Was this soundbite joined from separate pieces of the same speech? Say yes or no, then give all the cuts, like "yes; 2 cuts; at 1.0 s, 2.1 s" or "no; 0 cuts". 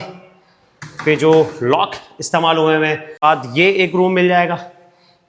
yes; 1 cut; at 3.2 s